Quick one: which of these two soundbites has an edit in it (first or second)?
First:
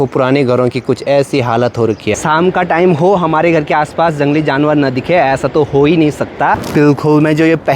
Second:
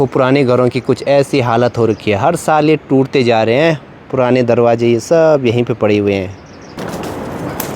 first